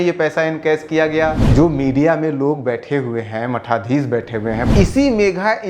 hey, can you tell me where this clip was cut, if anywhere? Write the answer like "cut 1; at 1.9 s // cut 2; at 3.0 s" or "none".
cut 1; at 1.4 s // cut 2; at 4.6 s